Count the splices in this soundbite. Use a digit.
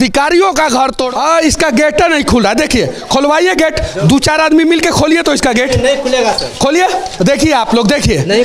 1